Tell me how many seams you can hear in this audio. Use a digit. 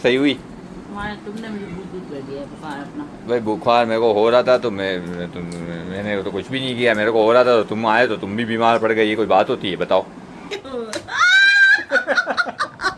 1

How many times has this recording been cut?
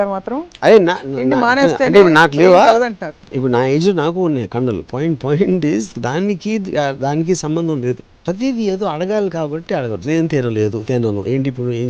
1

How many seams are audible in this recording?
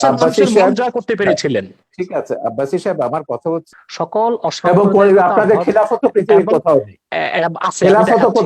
1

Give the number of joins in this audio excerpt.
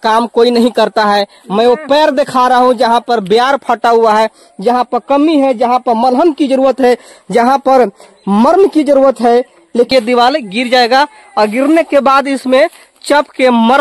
1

